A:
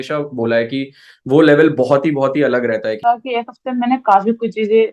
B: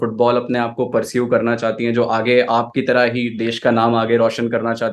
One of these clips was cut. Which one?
A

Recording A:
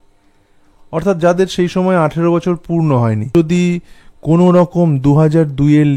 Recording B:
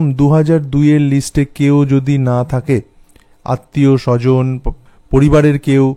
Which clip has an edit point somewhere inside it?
A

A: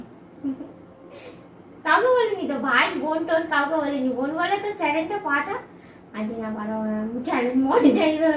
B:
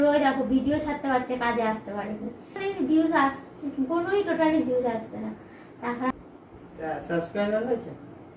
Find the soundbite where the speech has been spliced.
B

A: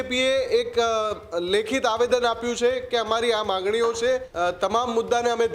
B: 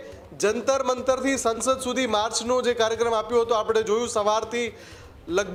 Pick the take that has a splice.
A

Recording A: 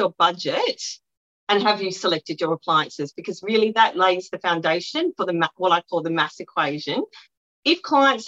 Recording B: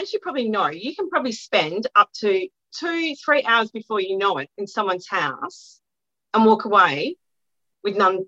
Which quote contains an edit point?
A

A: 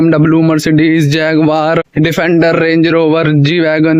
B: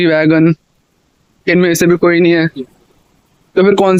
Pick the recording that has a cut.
A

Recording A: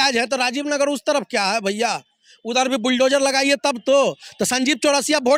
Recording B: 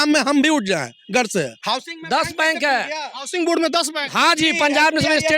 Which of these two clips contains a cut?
B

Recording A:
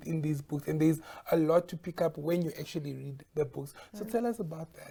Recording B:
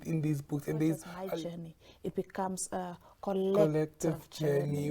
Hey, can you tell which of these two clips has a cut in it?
B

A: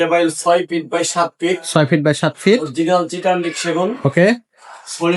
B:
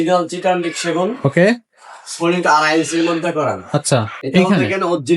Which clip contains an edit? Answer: B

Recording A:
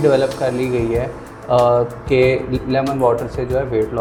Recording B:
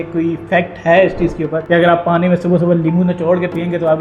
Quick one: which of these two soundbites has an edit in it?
B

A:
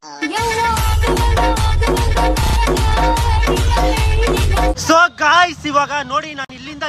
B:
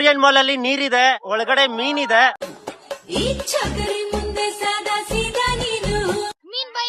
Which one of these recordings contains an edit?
A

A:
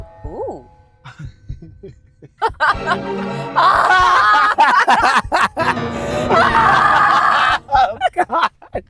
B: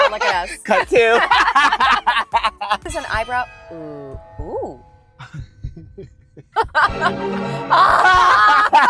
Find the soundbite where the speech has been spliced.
B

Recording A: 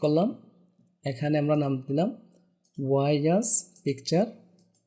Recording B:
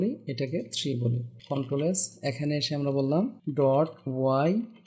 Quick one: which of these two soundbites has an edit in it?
B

